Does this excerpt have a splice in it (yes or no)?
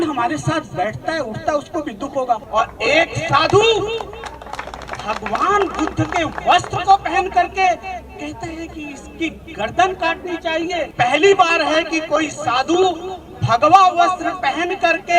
yes